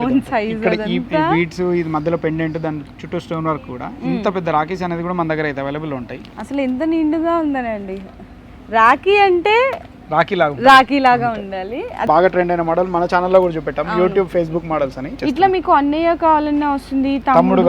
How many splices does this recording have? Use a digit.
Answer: 3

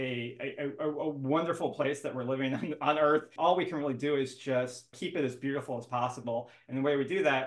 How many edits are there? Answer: 2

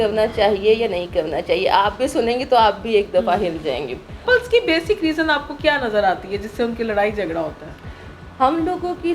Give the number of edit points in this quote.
1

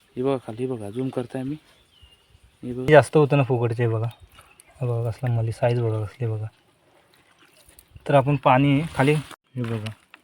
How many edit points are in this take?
2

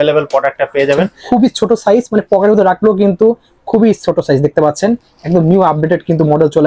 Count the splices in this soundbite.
1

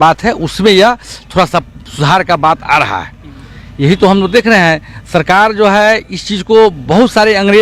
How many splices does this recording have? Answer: 0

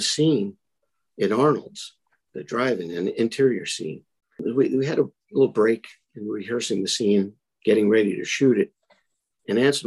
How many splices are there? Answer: 1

